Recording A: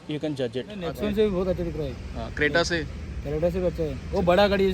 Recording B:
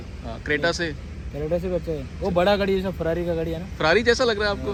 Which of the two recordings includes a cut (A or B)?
A